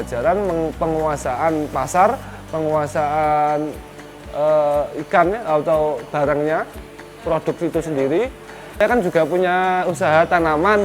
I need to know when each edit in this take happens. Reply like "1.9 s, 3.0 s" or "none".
8.8 s